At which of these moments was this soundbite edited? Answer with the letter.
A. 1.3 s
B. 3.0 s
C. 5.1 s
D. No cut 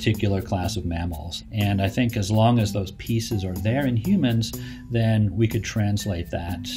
A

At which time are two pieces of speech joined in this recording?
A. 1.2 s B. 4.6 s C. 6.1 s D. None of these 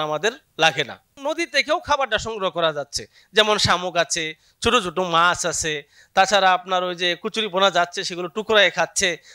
A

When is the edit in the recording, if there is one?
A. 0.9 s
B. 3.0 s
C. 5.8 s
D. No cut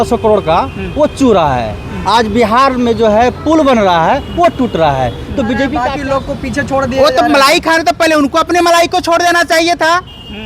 C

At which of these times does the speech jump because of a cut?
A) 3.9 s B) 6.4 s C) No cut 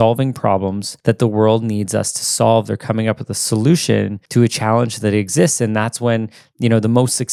C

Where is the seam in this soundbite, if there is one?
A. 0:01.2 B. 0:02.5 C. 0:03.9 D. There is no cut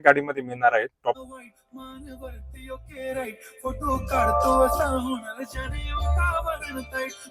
A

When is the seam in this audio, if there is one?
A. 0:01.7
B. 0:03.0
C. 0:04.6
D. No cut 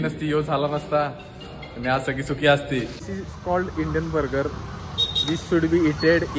B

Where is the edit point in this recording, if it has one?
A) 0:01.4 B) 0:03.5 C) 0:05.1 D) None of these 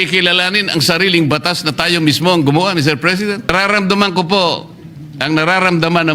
B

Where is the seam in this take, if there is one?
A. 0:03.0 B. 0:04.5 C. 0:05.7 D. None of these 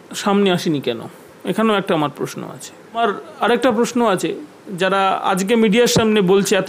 A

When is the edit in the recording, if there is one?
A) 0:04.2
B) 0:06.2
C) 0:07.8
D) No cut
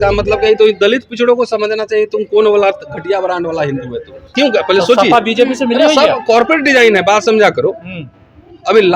A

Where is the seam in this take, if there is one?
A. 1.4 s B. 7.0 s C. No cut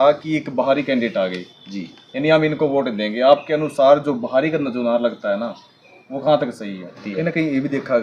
B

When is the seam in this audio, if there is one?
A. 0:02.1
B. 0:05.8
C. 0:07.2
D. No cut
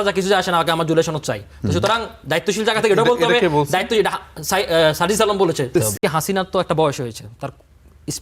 B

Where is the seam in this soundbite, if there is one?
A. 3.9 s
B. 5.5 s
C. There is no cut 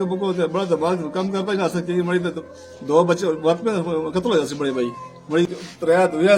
B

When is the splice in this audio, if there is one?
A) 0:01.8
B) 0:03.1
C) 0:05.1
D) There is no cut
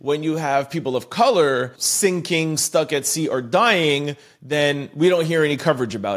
A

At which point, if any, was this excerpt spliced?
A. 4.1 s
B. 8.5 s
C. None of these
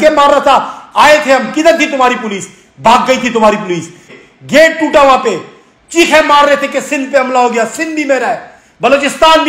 A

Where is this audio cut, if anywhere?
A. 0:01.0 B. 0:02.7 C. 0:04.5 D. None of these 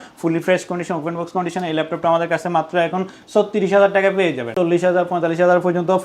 C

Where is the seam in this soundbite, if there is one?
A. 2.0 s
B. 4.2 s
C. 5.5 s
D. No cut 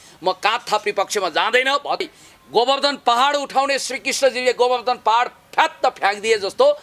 A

